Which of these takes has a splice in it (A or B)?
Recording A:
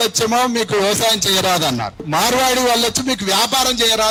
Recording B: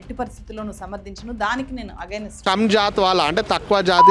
B